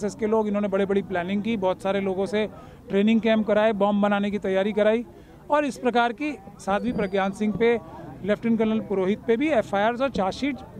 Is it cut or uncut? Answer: uncut